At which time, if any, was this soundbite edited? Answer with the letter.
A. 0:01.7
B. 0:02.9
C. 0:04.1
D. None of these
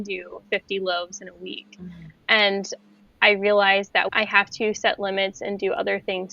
C